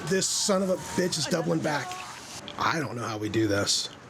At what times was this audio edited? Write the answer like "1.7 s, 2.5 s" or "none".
2.4 s